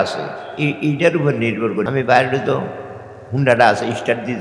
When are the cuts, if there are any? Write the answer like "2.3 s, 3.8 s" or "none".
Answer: 1.9 s